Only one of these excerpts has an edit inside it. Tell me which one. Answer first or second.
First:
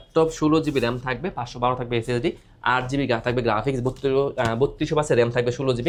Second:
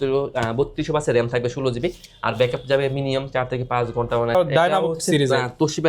second